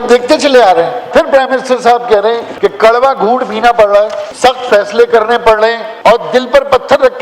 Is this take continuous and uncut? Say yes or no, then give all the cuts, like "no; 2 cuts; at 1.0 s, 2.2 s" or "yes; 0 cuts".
no; 4 cuts; at 1.1 s, 2.5 s, 4.2 s, 5.9 s